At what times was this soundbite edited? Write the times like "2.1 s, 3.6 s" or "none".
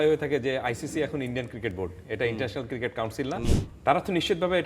3.5 s